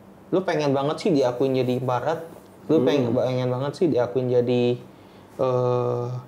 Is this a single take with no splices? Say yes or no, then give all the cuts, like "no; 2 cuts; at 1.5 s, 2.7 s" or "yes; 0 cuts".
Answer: yes; 0 cuts